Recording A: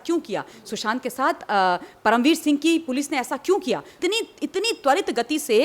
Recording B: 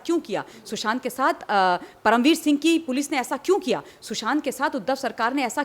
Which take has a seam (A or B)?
A